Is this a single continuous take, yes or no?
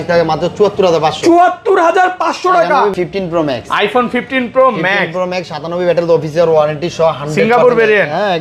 no